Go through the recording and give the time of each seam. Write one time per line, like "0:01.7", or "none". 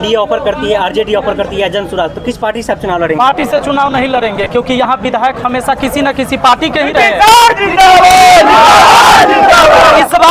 none

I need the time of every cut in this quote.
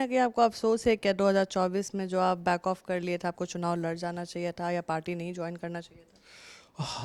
none

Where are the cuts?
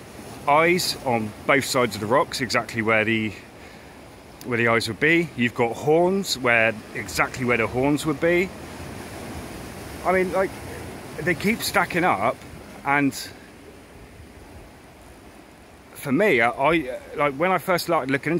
none

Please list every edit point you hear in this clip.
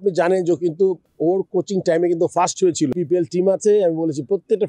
0:01.1
0:02.9

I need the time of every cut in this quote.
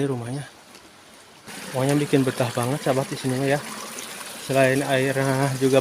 0:01.5

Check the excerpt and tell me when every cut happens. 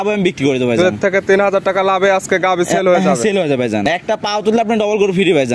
0:03.8

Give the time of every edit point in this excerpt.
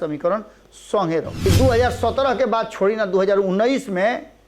0:01.5

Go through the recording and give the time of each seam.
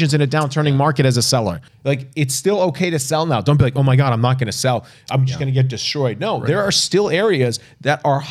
0:01.7

